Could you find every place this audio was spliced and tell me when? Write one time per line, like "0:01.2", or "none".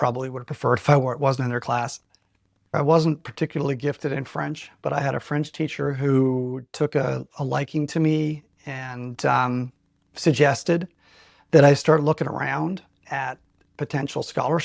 0:02.7